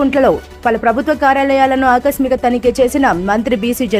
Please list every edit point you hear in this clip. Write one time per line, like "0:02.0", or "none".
none

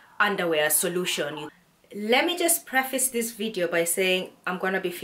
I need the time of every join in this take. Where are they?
0:01.4

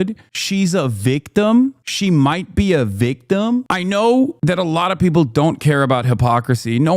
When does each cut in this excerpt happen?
0:03.7
0:04.4

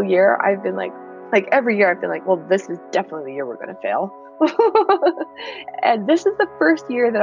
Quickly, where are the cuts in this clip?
0:01.0

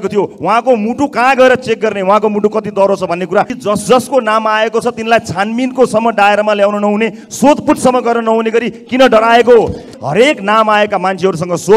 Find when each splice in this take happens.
0:03.6
0:10.0

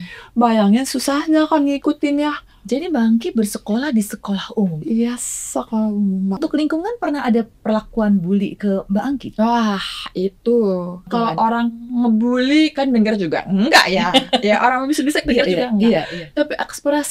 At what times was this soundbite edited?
0:06.4
0:11.1

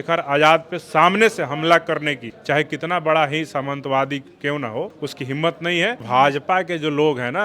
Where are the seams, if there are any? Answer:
0:02.3
0:05.0
0:06.0

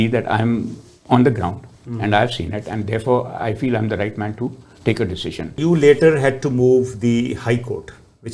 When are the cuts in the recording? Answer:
0:05.6

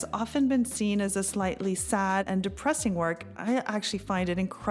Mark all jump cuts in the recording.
0:01.1
0:02.2

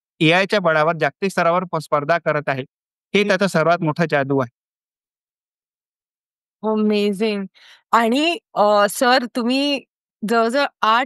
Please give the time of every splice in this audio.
none

